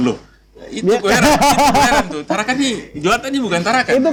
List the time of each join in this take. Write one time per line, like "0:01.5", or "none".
none